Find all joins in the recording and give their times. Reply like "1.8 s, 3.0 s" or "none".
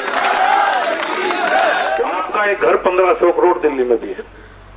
2.2 s